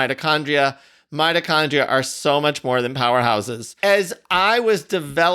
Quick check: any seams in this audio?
yes; 1 cut; at 3.6 s

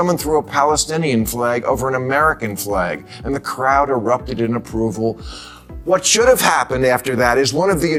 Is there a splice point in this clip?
no; 0 cuts

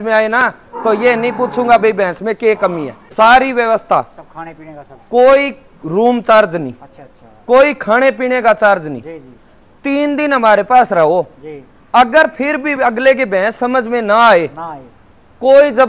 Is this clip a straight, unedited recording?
no; 1 cut; at 3.0 s

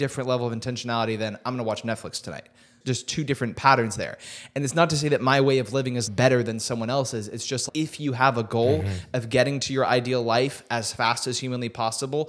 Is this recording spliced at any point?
yes; 3 cuts; at 2.7 s, 6.0 s, 7.6 s

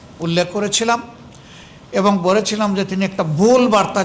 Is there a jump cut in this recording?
no; 0 cuts

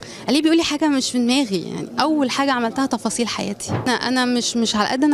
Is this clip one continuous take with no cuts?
no; 1 cut; at 3.9 s

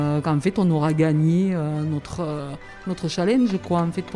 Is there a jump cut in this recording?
no; 0 cuts

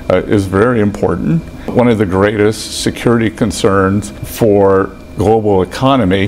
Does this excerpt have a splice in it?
yes; 3 cuts; at 1.7 s, 4.2 s, 5.0 s

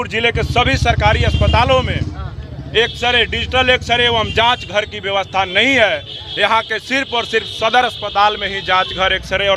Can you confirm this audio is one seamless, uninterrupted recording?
yes; 0 cuts

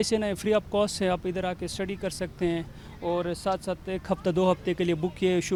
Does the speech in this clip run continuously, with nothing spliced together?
yes; 0 cuts

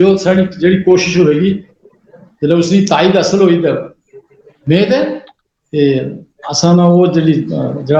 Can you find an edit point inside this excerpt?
no; 0 cuts

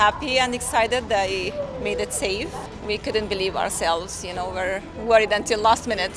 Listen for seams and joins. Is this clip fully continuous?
yes; 0 cuts

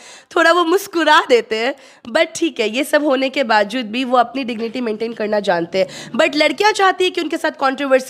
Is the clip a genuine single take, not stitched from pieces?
yes; 0 cuts

